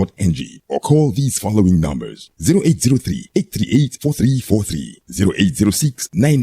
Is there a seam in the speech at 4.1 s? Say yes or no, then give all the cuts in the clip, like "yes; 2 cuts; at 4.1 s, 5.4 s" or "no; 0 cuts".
yes; 1 cut; at 4.1 s